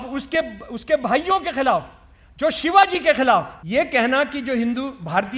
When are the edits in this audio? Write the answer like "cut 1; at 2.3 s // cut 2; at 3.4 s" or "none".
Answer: cut 1; at 3.6 s